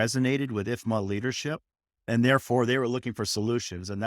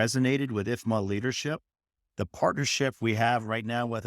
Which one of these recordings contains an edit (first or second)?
second